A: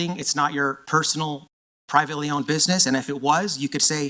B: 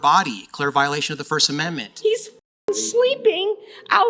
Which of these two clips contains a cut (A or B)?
B